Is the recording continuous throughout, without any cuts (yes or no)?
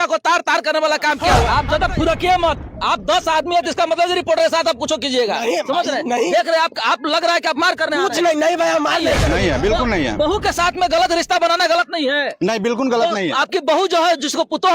no